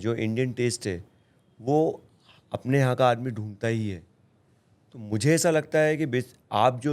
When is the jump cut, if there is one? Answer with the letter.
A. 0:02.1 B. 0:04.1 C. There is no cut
C